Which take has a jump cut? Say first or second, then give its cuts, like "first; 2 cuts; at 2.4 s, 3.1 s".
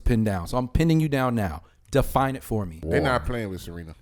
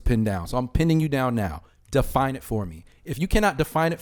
first; 1 cut; at 2.8 s